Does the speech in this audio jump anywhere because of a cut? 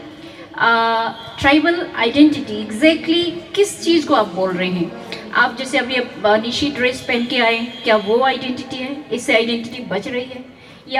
no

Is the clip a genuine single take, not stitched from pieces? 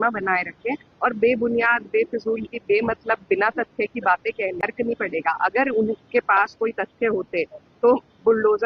yes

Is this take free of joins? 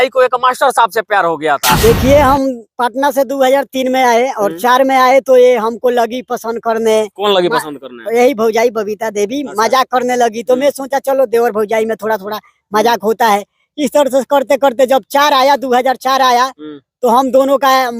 no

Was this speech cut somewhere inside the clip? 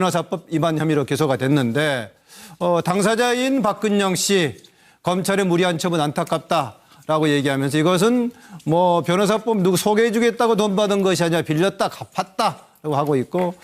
yes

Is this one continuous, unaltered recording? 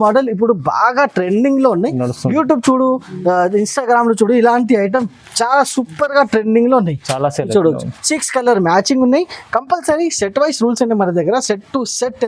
yes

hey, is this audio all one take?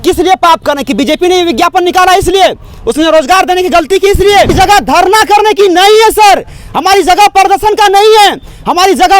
no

